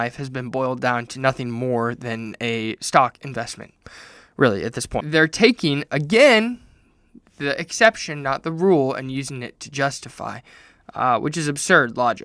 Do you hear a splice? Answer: yes; 1 cut; at 5.0 s

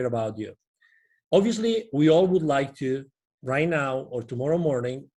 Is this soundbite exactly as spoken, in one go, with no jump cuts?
yes; 0 cuts

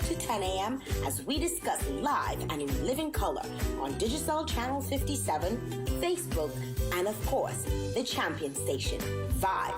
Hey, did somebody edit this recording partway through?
yes; 2 cuts; at 7.7 s, 9.0 s

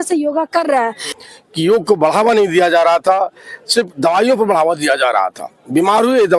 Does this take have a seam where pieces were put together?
yes; 1 cut; at 1.1 s

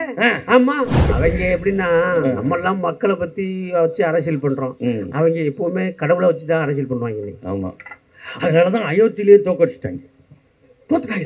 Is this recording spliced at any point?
no; 0 cuts

